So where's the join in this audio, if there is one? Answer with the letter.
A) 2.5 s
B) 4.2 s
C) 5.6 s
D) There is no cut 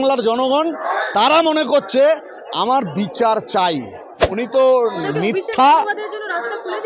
B